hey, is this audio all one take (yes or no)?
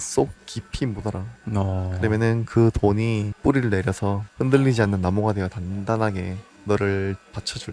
yes